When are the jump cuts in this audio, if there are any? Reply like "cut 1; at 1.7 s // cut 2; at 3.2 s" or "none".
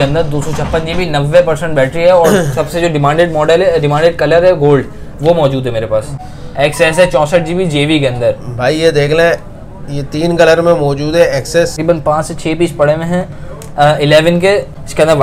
cut 1; at 6.2 s // cut 2; at 11.8 s